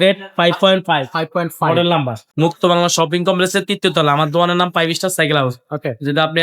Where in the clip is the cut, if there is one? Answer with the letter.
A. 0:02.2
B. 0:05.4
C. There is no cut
A